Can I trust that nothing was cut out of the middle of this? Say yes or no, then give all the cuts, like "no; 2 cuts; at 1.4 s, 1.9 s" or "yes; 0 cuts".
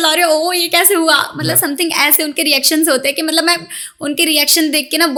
yes; 0 cuts